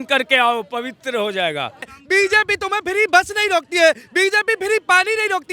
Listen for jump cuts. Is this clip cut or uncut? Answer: cut